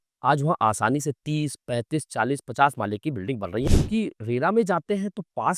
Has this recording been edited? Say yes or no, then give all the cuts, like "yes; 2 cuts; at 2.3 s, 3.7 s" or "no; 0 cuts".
yes; 1 cut; at 3.6 s